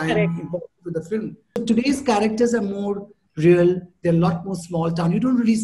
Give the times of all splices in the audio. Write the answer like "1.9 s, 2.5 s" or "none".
1.6 s